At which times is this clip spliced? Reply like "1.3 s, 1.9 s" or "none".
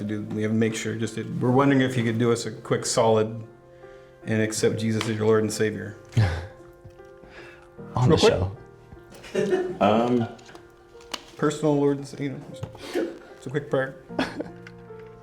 none